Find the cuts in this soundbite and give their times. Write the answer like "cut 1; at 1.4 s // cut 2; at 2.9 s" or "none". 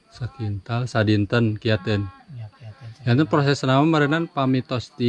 none